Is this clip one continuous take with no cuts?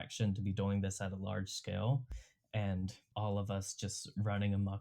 no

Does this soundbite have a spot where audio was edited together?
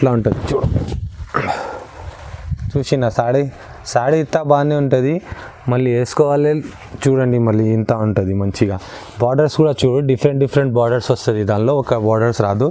no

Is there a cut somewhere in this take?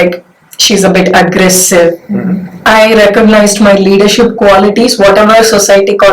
yes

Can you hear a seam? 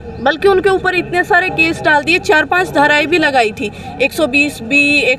no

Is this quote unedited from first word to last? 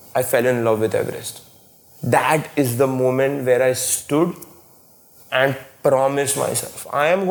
yes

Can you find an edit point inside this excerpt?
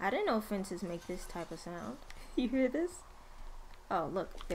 no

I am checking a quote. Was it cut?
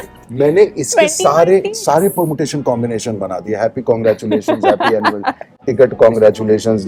no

